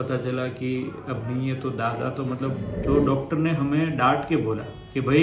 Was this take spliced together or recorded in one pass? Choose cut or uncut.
cut